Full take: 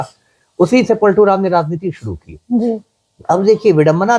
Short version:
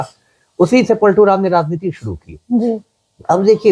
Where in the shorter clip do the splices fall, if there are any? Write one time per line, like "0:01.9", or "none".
none

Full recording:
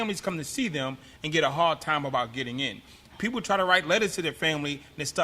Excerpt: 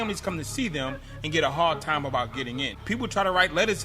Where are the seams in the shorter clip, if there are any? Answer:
0:02.7

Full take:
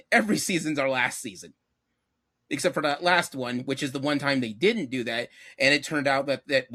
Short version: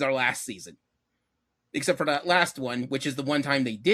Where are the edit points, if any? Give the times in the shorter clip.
none

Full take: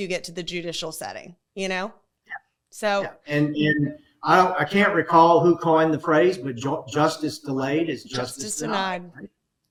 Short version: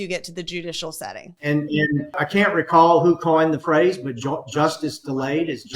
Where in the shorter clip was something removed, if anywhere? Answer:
0:01.3
0:02.2

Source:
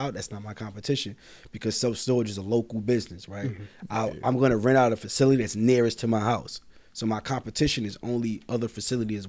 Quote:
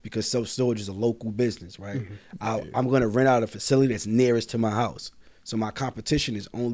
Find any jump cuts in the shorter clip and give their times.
none

